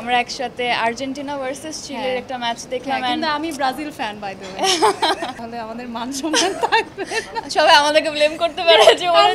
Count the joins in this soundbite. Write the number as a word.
one